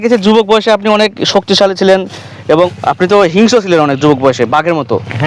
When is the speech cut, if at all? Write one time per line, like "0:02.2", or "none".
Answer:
0:02.7